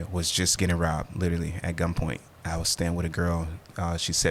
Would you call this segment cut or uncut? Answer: uncut